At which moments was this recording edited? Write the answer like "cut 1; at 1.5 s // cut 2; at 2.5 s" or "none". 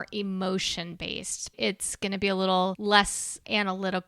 cut 1; at 1.6 s // cut 2; at 2.8 s